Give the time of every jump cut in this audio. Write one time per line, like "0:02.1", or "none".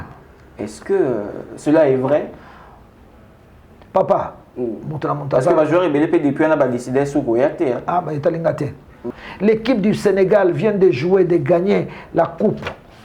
0:09.0